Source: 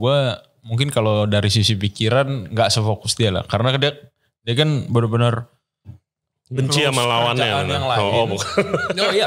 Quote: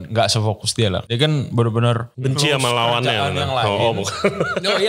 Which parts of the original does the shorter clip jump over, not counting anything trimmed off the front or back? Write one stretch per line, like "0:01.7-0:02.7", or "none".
0:03.4-0:04.4
0:05.5-0:06.4